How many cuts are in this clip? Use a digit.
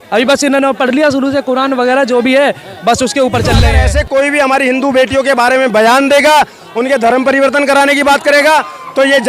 1